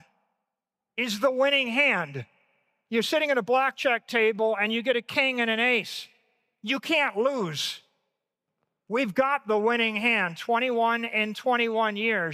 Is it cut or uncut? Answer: uncut